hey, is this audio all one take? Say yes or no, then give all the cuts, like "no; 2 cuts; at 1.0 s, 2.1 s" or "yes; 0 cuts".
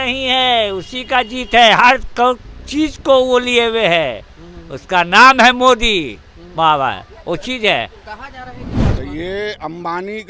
no; 1 cut; at 8.7 s